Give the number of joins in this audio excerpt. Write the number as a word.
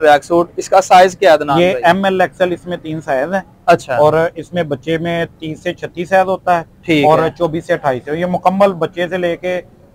zero